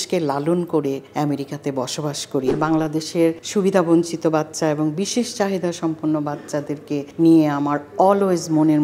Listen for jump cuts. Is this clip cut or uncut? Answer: cut